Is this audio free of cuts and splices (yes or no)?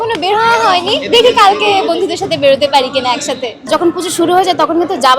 no